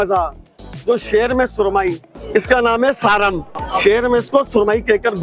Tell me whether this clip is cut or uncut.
cut